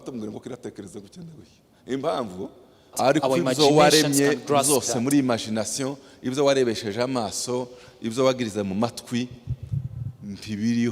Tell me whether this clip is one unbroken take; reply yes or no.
no